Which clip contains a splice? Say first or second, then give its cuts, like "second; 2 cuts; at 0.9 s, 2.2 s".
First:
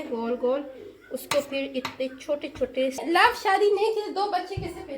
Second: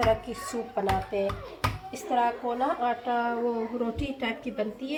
first; 1 cut; at 3.0 s